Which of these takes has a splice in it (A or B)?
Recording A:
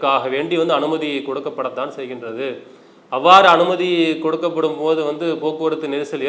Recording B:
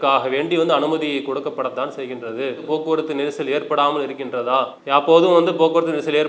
B